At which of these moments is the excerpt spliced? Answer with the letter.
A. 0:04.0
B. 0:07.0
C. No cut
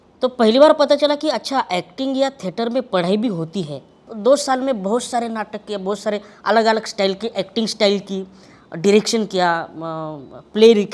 A